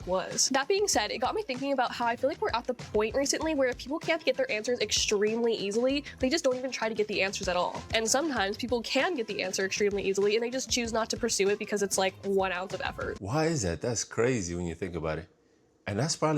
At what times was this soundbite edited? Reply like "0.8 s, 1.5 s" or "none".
13.1 s